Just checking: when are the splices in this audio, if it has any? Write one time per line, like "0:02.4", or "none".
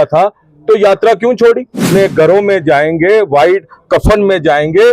0:01.9